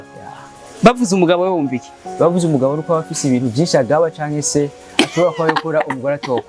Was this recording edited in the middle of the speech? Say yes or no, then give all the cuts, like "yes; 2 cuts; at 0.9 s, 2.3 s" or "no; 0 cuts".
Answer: no; 0 cuts